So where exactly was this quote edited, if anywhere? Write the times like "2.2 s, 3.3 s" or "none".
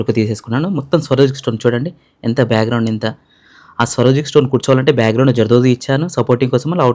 none